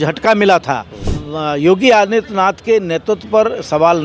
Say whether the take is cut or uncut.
cut